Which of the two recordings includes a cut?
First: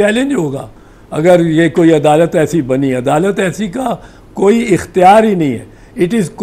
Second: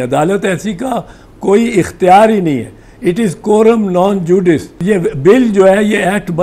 second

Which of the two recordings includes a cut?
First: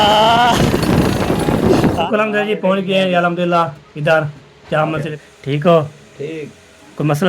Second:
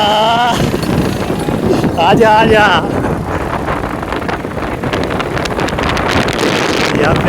first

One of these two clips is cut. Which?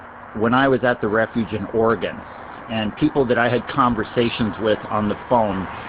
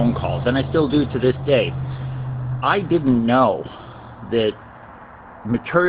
first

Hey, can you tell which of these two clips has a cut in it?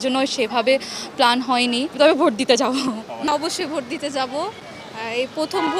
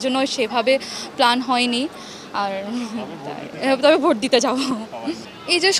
first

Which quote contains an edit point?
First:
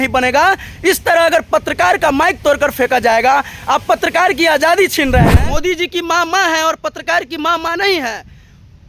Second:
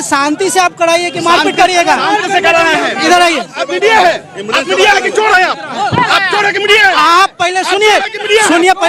first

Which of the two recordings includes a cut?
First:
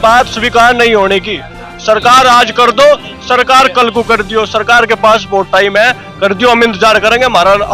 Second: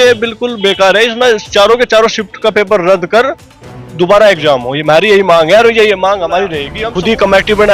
second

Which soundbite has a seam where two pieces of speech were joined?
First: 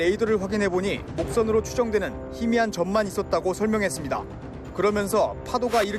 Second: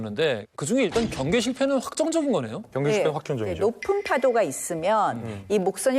second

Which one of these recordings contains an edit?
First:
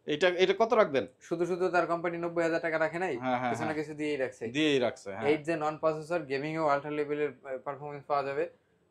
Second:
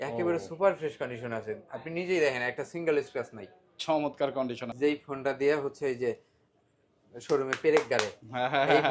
second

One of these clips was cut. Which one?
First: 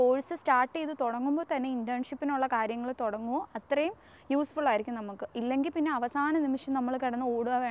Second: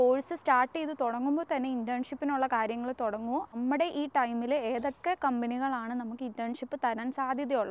second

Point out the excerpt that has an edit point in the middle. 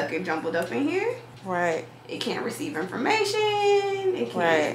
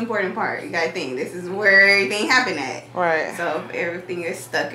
first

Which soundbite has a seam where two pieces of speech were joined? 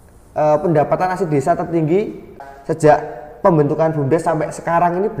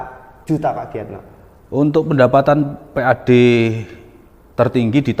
first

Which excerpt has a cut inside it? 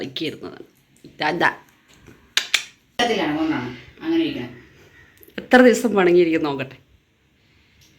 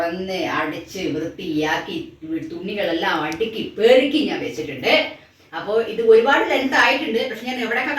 first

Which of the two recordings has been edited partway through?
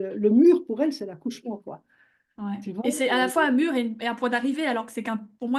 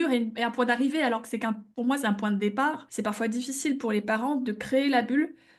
second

